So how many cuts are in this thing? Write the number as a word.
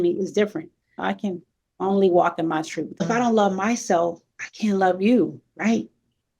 two